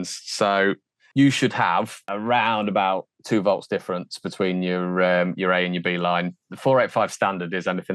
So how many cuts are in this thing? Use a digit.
2